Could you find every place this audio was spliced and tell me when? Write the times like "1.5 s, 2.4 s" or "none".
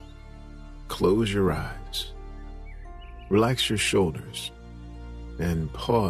none